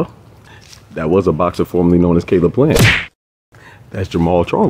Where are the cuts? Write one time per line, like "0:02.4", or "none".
0:02.9

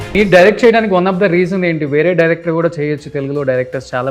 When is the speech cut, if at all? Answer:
none

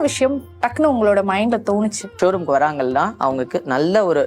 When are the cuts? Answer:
0:02.1

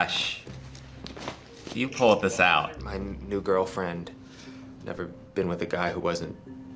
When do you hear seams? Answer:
0:01.8

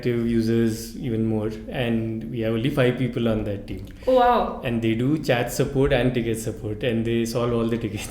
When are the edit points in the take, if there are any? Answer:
none

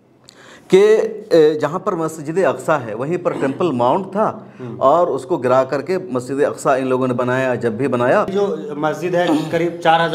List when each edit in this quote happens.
0:08.3

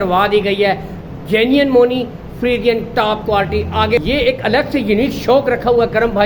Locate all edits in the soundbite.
0:04.0

